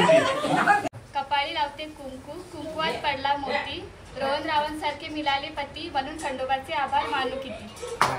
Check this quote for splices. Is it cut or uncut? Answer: cut